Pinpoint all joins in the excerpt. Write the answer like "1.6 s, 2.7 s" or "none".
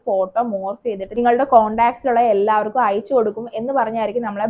1.1 s